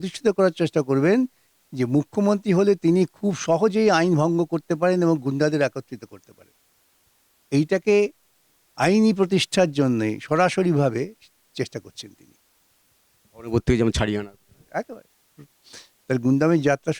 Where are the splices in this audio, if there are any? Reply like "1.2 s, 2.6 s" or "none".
none